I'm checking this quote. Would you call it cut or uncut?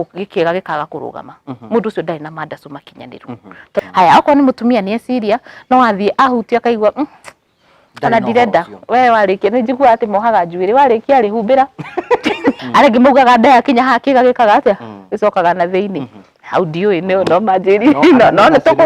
cut